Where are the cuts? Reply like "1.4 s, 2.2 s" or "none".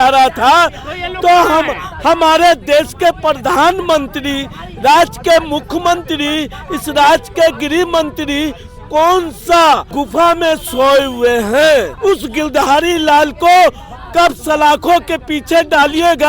9.9 s, 11.9 s